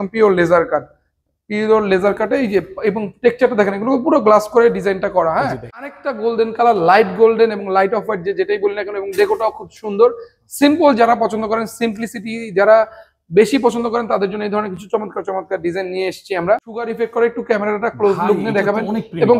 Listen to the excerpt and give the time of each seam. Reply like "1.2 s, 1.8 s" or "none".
6.0 s, 16.9 s